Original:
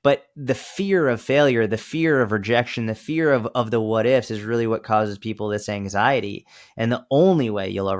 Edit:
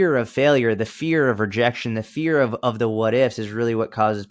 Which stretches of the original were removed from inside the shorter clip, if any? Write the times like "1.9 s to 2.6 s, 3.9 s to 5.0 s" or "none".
none